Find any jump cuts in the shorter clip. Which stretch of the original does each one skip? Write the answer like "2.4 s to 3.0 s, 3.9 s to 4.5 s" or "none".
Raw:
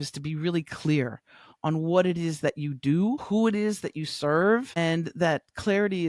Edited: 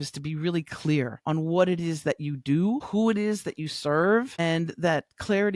1.2 s to 1.5 s